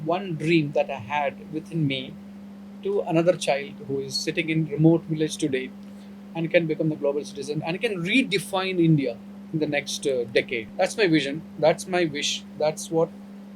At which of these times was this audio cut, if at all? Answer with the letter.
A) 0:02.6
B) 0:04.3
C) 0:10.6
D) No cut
C